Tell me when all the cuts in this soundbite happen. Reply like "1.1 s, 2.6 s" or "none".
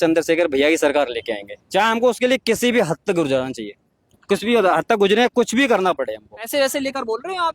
6.5 s

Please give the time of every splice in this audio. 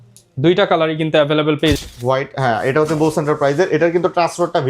1.8 s

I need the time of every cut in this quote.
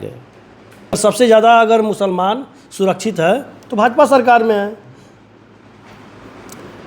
1.0 s

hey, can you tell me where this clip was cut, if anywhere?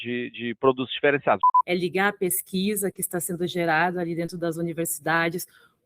1.4 s

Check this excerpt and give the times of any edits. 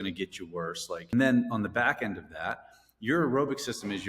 1.1 s

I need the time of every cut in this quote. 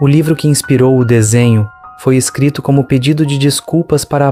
none

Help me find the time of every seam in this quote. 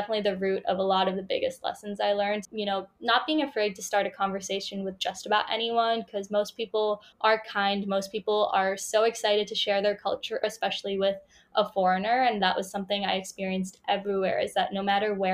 2.4 s, 7.1 s, 10.4 s

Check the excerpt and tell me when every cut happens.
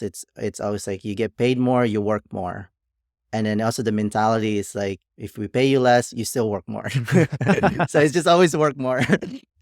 5.1 s

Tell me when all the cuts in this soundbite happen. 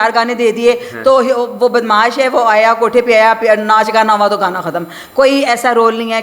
none

